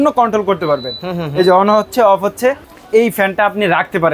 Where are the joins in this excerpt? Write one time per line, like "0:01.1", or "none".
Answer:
0:02.7